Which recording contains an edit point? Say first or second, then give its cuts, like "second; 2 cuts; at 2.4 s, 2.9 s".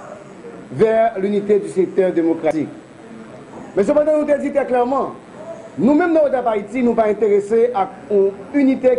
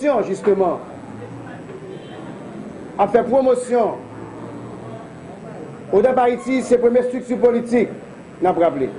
first; 1 cut; at 2.5 s